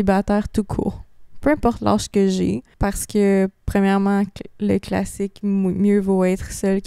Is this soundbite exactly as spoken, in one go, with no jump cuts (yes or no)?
no